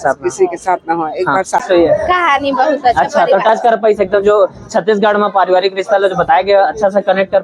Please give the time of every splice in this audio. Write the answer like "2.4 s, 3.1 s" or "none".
1.6 s